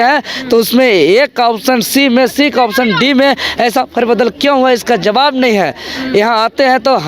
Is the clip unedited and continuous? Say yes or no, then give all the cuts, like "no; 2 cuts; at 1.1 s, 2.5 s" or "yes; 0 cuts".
yes; 0 cuts